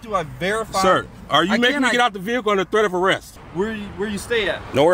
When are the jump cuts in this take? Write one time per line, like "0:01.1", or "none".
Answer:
0:03.4